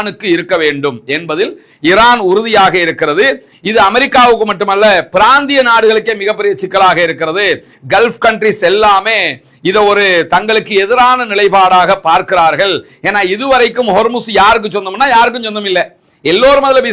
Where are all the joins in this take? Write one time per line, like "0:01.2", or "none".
none